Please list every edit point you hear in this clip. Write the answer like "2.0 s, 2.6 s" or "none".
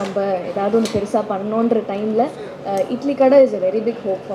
none